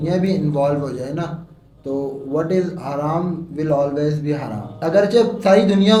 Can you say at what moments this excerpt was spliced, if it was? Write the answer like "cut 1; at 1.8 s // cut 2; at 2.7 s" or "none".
none